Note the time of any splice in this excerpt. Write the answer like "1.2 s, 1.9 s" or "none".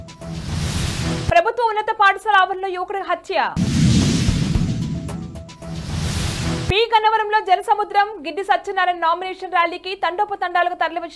1.3 s